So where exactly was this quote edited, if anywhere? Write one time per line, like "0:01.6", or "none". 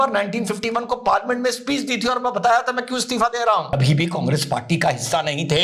0:03.7

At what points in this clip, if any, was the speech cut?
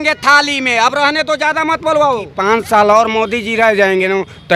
0:02.3

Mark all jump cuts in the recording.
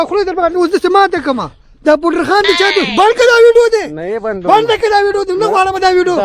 none

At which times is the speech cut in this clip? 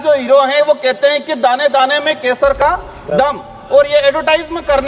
none

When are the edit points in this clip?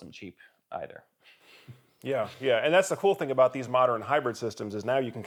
none

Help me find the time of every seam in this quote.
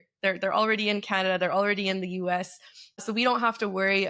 0:03.0

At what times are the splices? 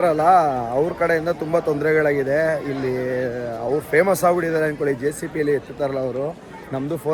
none

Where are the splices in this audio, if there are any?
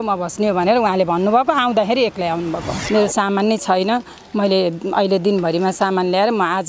0:02.7

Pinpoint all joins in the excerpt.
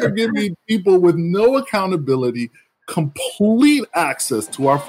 none

